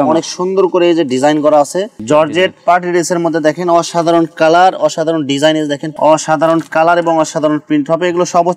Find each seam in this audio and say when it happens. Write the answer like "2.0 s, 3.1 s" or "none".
1.9 s, 5.9 s